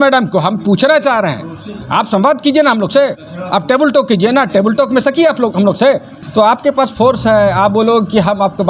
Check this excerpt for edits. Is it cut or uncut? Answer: cut